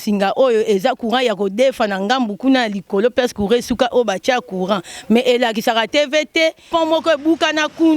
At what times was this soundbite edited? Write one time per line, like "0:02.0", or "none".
0:06.7